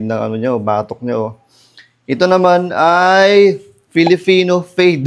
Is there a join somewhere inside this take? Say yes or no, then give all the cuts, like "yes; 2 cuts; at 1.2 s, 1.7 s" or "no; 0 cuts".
no; 0 cuts